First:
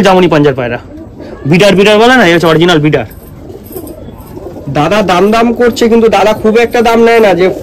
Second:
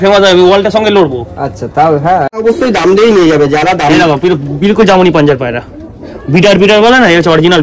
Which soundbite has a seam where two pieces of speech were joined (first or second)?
second